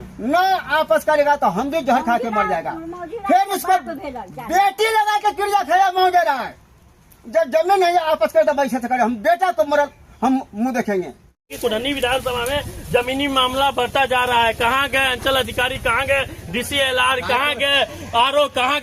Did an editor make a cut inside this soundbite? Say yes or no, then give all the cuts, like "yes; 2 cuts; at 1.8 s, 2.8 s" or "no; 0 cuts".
yes; 1 cut; at 11.5 s